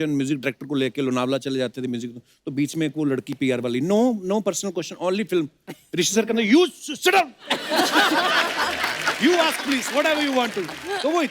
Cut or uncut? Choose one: uncut